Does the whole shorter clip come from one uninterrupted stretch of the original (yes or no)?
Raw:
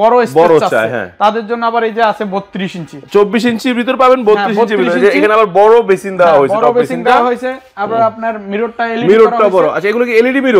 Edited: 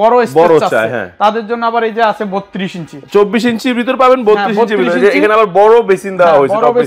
yes